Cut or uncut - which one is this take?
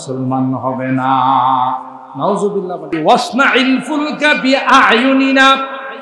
cut